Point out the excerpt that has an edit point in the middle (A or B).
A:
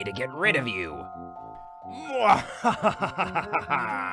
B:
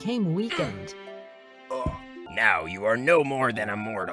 B